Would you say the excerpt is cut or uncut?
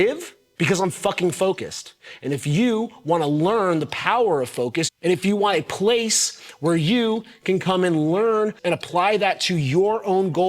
cut